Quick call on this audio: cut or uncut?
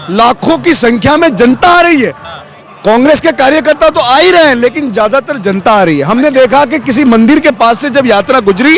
uncut